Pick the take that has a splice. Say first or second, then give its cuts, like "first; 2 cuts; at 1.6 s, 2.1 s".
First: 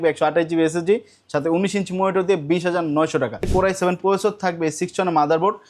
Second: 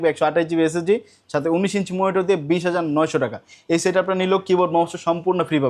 first; 1 cut; at 3.5 s